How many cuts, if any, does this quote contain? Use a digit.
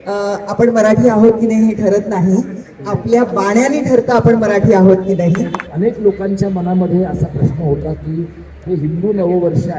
1